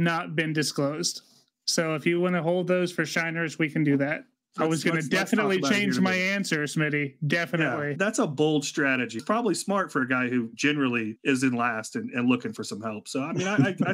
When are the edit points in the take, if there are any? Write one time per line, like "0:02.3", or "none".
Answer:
0:04.3
0:07.9
0:09.2
0:11.0